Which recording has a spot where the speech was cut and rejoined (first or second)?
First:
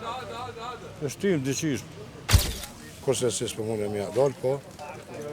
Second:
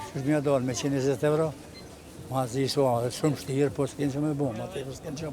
first